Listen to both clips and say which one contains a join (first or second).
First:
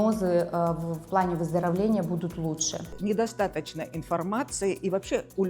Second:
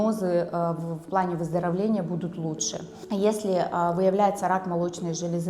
first